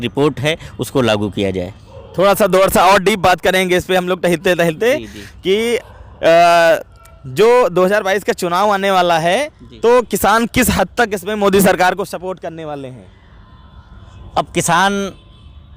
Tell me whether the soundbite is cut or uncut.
uncut